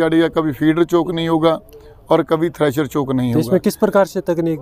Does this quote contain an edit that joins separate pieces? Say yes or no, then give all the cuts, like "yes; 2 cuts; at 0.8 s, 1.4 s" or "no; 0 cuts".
no; 0 cuts